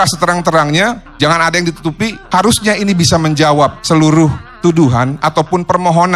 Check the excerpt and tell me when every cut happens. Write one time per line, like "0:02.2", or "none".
0:01.1
0:02.2
0:03.8
0:04.5